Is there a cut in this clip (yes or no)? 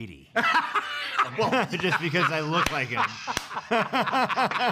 no